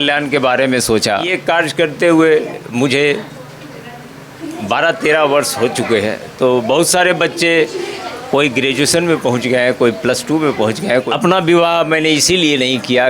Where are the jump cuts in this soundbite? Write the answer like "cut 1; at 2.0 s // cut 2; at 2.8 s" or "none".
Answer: cut 1; at 1.3 s // cut 2; at 11.1 s